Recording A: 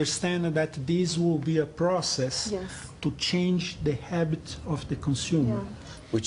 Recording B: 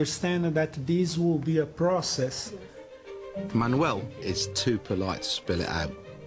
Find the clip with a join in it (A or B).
A